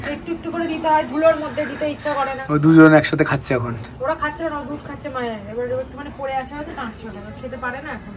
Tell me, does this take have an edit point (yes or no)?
no